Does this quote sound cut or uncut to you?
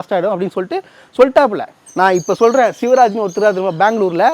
cut